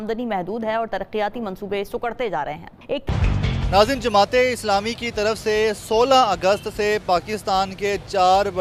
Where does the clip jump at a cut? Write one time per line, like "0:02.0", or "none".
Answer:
none